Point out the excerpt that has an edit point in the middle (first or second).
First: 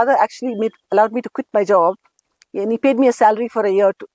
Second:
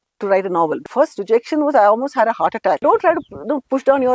second